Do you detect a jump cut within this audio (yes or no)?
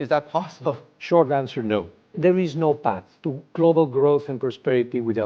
yes